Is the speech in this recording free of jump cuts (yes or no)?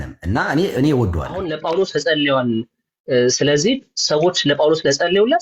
no